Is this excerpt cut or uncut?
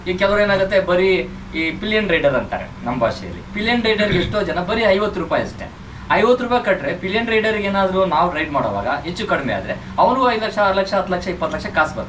uncut